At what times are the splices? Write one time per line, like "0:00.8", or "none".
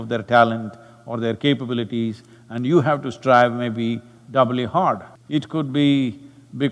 0:05.1